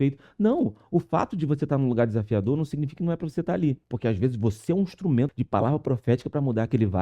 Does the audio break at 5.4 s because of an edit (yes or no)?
yes